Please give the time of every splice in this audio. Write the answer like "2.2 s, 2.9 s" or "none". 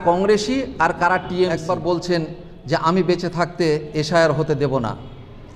1.6 s